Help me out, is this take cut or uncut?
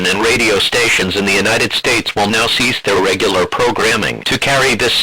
cut